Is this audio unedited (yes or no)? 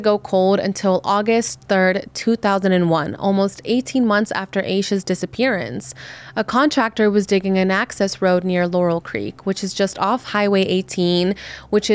yes